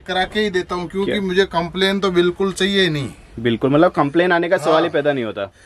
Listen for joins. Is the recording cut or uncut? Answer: uncut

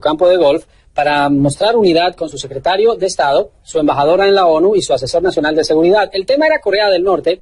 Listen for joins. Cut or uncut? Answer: uncut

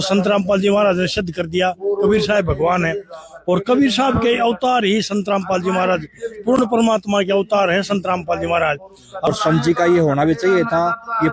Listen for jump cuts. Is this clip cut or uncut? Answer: cut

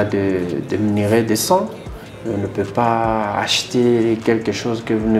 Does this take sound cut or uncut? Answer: uncut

